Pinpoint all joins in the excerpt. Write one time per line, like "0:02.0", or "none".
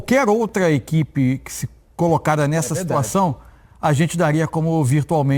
none